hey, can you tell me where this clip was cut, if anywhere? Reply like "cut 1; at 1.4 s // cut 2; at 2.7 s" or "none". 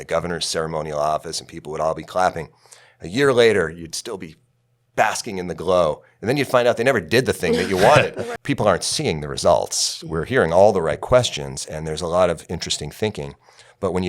cut 1; at 8.2 s